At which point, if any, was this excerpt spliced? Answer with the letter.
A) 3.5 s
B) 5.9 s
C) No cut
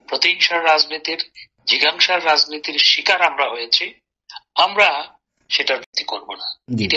B